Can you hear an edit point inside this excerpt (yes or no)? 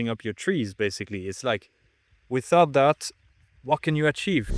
no